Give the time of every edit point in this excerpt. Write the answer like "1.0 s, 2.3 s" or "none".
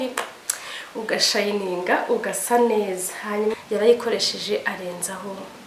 3.5 s